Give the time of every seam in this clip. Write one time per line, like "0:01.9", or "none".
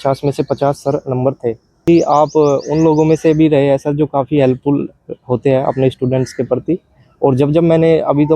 0:01.7